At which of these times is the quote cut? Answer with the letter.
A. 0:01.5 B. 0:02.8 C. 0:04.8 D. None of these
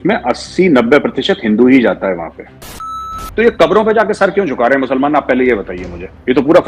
B